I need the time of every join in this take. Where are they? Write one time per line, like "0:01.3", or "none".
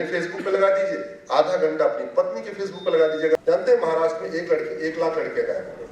0:03.4

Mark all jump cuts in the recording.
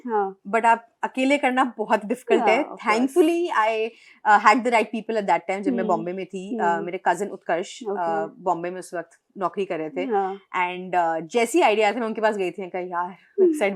none

